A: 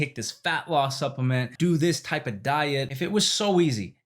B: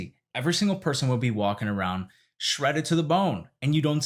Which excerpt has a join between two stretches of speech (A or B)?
A